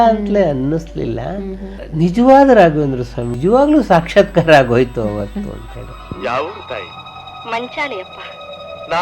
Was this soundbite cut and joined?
yes; 1 cut; at 3.3 s

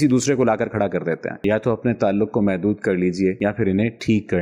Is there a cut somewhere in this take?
yes; 1 cut; at 1.4 s

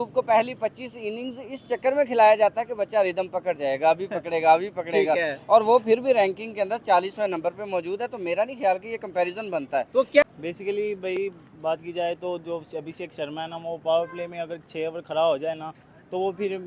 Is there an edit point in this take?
yes; 1 cut; at 10.2 s

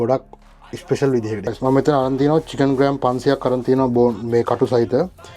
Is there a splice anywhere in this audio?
yes; 1 cut; at 1.5 s

